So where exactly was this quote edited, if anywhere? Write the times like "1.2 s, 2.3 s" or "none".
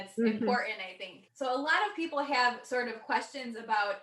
1.2 s